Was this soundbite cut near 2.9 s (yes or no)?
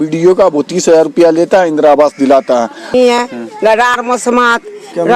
yes